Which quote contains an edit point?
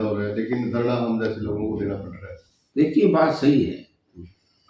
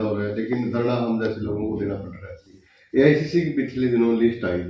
second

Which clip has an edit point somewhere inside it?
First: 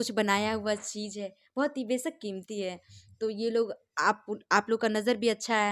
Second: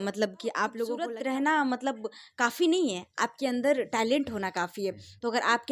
second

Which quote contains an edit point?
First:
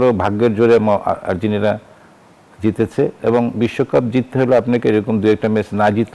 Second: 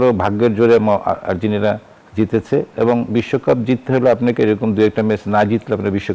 second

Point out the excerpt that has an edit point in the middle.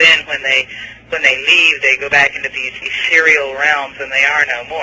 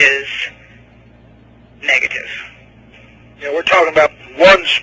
first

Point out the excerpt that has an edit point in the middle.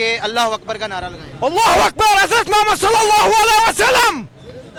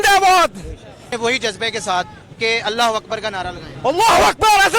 second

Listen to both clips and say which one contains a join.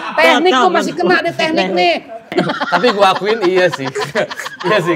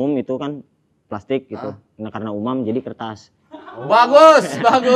first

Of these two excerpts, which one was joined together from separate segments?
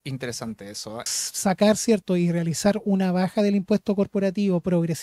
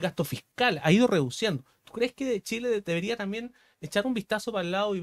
first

